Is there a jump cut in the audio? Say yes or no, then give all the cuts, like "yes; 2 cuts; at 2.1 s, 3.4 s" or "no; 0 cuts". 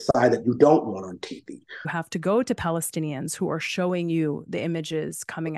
yes; 1 cut; at 1.9 s